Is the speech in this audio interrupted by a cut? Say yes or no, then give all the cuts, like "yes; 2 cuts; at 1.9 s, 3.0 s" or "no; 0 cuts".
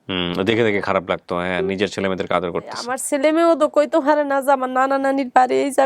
yes; 1 cut; at 2.9 s